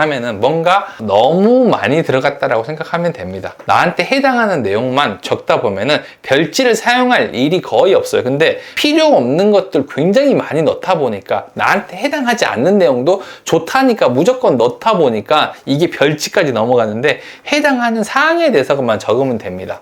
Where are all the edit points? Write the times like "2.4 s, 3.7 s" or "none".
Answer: none